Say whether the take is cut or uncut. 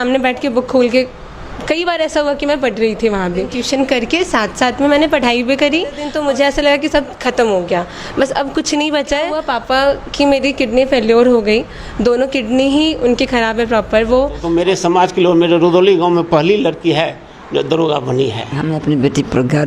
cut